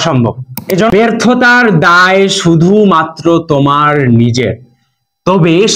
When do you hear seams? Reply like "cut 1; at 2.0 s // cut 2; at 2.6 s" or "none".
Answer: cut 1; at 0.9 s